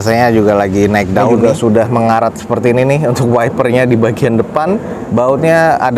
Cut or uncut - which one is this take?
cut